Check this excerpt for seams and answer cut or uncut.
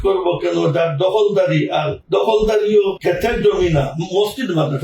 cut